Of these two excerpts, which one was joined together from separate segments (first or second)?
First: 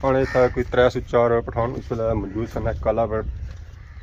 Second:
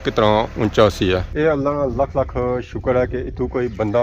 second